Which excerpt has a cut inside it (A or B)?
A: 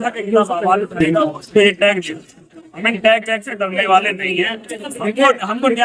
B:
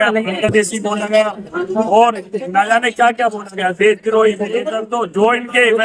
B